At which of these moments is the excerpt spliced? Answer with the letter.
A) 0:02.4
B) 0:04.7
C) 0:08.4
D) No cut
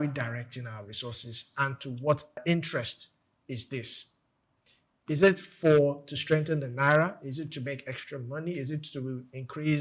A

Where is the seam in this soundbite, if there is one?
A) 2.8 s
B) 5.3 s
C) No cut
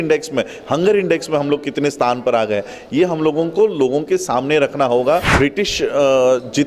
B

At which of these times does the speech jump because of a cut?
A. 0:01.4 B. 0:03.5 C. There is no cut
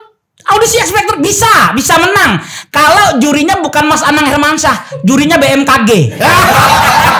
C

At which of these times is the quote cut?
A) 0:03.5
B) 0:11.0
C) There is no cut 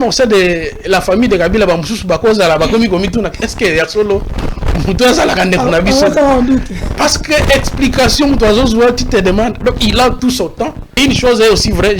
B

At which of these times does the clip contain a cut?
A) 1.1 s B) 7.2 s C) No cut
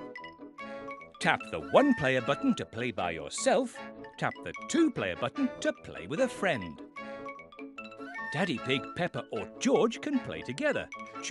A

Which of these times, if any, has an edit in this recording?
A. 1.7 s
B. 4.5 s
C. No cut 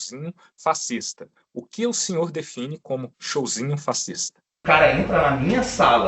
B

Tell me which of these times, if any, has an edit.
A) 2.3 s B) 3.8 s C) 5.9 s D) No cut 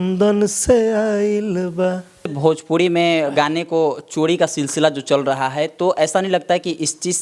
A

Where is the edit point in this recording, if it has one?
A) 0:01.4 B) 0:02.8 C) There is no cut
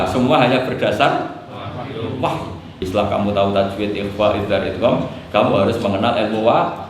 B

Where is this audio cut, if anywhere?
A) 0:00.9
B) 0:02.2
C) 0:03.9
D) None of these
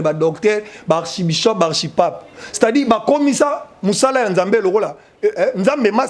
D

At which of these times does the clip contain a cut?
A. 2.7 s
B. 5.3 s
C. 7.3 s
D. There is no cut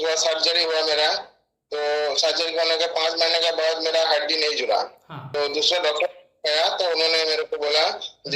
B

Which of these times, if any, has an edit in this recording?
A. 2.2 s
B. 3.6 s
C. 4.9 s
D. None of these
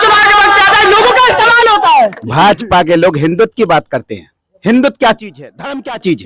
A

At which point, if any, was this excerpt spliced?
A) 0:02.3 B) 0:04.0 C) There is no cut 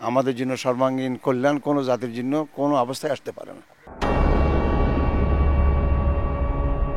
C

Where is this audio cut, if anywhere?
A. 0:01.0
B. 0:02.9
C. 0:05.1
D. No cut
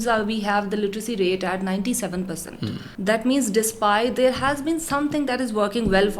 B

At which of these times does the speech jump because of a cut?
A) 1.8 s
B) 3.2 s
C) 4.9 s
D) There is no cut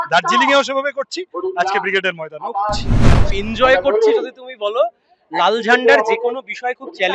B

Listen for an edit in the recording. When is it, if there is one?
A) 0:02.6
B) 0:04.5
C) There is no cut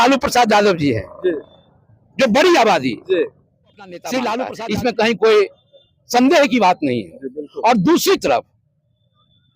B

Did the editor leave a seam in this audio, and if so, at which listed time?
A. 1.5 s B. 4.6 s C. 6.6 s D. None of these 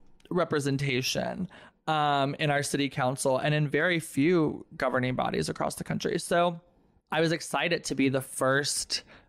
C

